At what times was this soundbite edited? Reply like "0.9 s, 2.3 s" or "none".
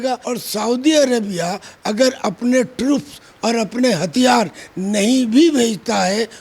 none